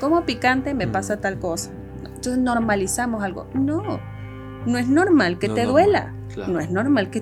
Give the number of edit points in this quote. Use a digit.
0